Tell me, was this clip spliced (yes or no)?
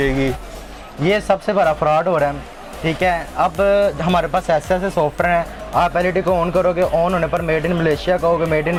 no